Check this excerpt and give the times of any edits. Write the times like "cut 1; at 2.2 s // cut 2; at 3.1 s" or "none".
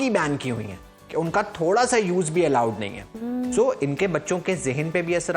none